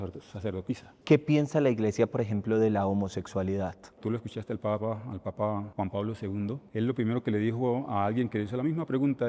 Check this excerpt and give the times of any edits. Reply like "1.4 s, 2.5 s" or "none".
0.9 s, 3.9 s

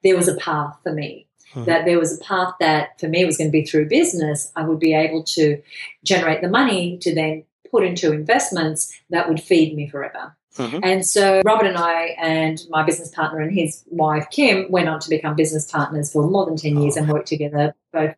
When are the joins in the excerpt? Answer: 11.4 s

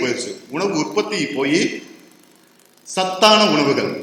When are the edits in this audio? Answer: none

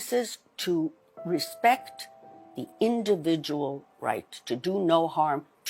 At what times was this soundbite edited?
1.1 s

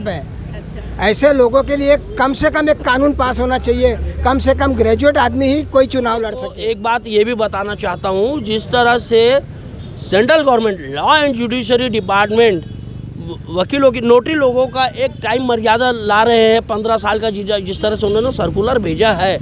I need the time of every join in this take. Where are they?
6.5 s

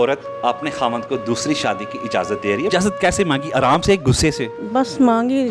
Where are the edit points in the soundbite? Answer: 2.7 s, 4.6 s

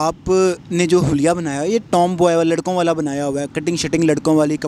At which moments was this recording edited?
none

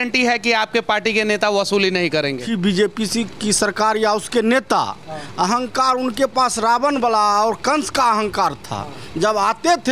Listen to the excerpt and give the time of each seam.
2.5 s

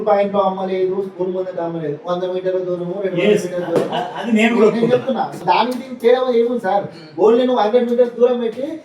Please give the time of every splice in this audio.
5.3 s

